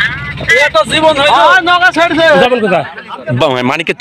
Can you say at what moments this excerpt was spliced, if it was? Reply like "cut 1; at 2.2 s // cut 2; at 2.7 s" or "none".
cut 1; at 2.4 s

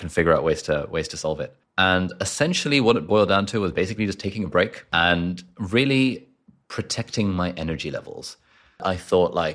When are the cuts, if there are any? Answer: cut 1; at 1.6 s // cut 2; at 4.9 s // cut 3; at 8.8 s

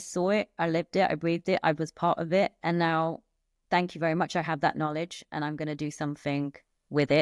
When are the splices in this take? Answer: none

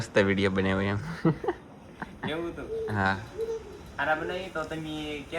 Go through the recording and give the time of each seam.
none

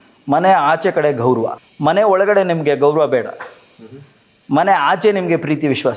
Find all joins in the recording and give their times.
cut 1; at 1.6 s

